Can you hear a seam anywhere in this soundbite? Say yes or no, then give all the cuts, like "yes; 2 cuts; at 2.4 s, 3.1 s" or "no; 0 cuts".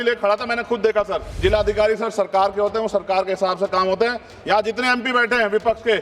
yes; 1 cut; at 1.2 s